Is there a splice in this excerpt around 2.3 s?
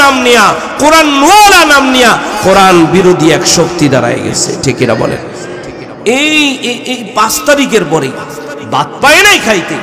yes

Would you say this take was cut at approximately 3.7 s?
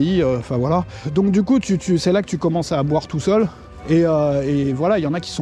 yes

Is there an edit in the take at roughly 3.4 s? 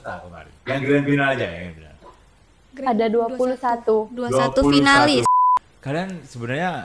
no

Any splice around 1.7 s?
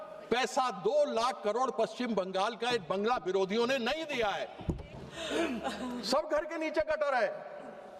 no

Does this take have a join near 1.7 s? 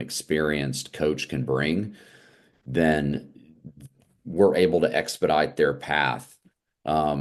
no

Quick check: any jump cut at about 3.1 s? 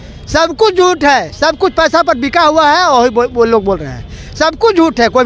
no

